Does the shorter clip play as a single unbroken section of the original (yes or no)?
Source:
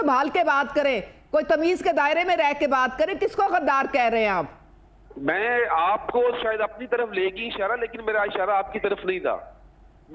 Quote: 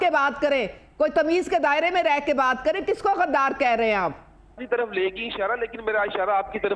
no